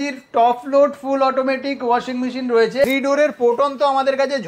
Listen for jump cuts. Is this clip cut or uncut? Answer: cut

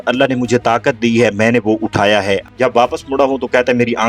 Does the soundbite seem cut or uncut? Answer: cut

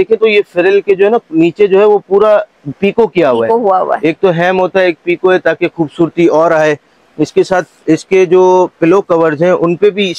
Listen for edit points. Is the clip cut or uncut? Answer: uncut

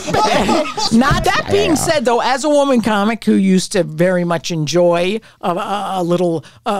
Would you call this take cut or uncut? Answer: cut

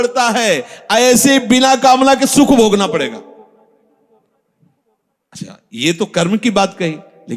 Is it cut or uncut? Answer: uncut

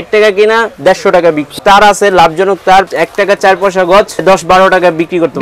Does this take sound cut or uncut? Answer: cut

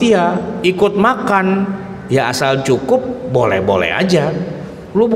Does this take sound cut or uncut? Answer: uncut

